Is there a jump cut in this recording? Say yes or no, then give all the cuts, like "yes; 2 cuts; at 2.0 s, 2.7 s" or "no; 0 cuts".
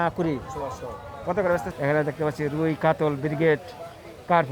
yes; 1 cut; at 1.7 s